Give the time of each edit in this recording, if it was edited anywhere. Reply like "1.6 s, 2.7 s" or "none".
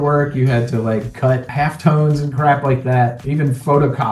1.5 s, 3.2 s